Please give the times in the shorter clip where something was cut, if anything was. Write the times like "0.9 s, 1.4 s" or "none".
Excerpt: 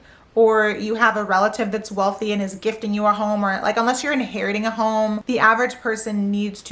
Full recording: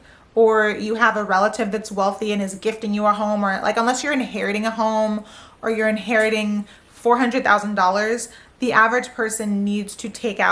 5.2 s